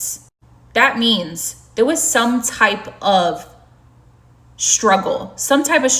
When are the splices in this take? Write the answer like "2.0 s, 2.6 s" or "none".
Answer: none

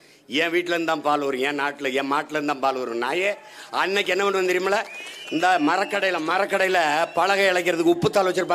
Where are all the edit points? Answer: none

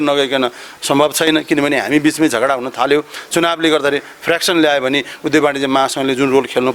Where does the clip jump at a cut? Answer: none

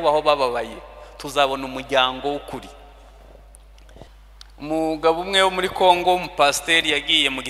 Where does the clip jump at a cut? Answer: 4.1 s

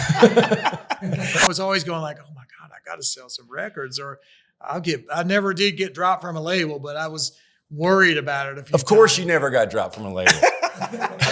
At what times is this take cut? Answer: 1.4 s

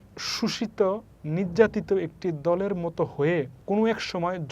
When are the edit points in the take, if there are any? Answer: 3.6 s

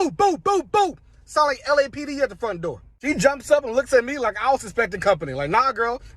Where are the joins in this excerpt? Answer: none

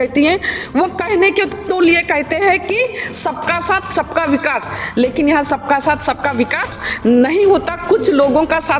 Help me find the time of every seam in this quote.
none

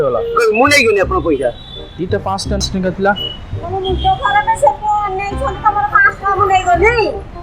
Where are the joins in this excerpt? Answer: 2.6 s

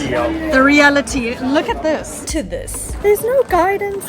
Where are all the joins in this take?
2.5 s

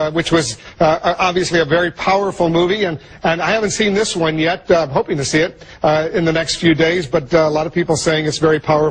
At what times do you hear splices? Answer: 4.1 s

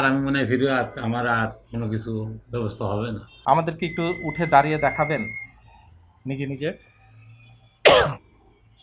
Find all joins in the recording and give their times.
3.3 s

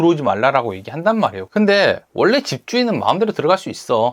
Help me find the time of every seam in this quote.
1.4 s

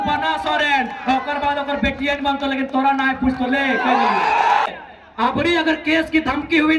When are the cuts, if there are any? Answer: 4.7 s

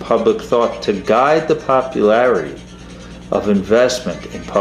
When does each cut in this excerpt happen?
none

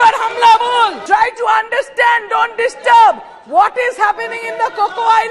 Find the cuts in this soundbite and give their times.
1.0 s

